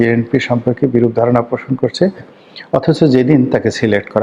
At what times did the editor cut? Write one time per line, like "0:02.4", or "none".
0:02.3